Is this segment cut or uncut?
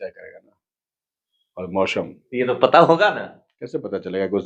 uncut